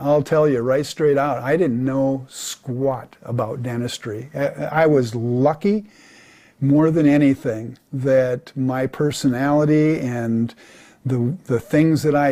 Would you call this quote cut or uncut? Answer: uncut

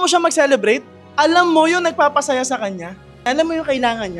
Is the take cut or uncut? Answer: cut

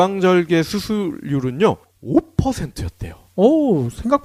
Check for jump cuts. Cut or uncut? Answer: uncut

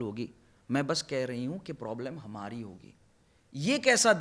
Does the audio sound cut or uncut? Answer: uncut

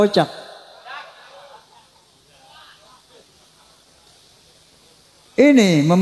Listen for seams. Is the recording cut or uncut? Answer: uncut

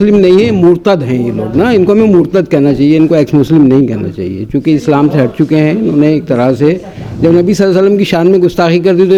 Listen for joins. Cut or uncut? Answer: uncut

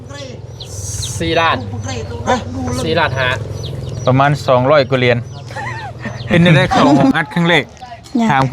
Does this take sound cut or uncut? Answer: cut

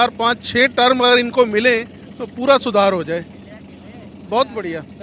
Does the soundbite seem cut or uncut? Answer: uncut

